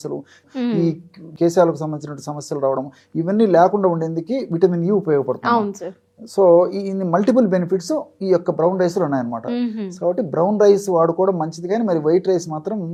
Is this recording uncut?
yes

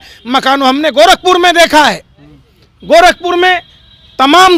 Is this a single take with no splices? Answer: yes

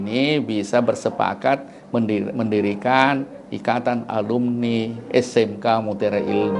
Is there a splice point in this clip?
no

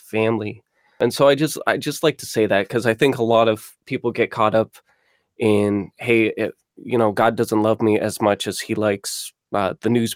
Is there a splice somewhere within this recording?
yes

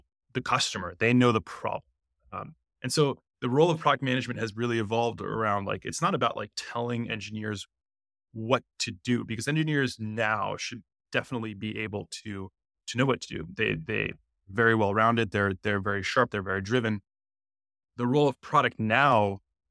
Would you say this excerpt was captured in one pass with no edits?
yes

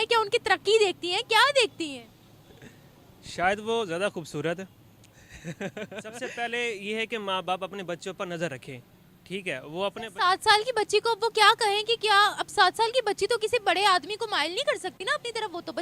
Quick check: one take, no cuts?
no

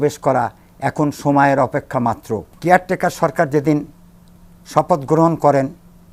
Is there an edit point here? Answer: yes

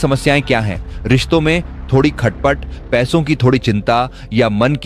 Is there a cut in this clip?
no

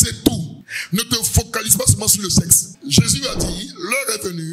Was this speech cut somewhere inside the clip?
yes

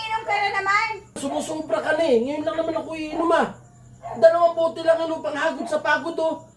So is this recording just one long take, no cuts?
no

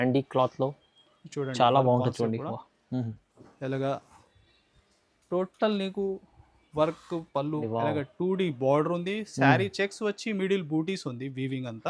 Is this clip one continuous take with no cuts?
no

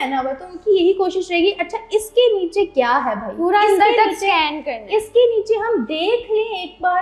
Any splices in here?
no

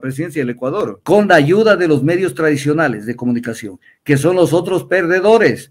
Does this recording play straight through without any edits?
no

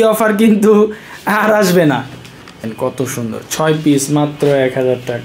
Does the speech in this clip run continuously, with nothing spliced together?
no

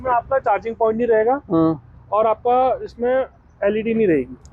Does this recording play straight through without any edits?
yes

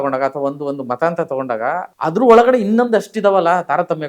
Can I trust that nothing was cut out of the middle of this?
no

